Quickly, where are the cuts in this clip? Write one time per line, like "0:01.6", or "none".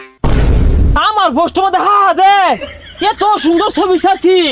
0:00.9